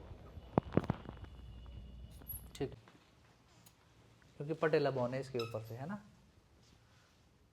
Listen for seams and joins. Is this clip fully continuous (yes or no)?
no